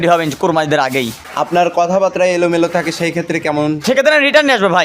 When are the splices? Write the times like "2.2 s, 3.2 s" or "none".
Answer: 1.2 s, 3.8 s